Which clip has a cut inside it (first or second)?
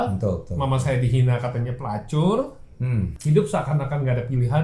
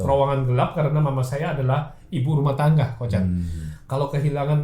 first